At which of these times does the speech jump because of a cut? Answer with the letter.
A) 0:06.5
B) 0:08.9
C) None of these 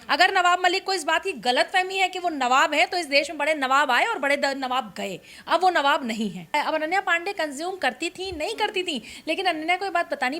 A